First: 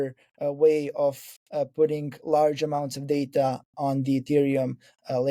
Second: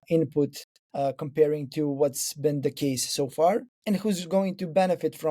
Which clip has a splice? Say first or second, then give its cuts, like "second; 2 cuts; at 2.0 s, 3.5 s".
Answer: second; 1 cut; at 3.7 s